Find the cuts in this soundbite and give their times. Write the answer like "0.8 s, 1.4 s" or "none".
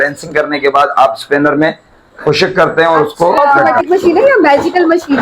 3.8 s

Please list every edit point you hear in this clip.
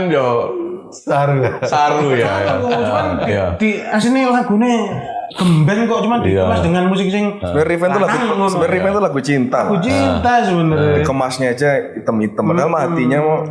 none

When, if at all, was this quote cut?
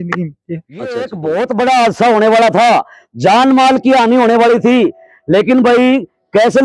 1.1 s

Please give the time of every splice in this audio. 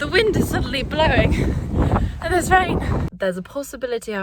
3.1 s

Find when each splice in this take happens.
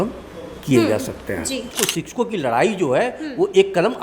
1.7 s

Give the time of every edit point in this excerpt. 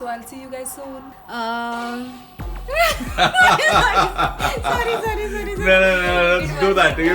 1.1 s

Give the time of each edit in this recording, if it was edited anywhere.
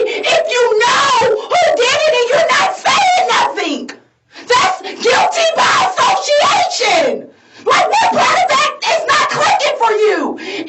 none

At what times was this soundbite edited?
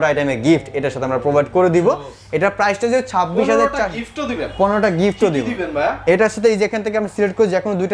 none

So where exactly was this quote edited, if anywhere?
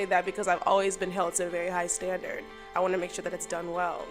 2.5 s

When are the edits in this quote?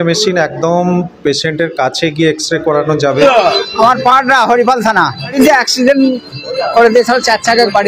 3.2 s, 5.3 s

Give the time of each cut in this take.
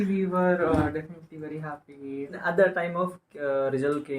2.4 s

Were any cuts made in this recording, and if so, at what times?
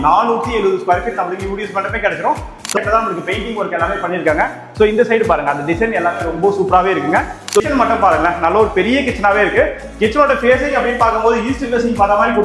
2.8 s, 7.6 s

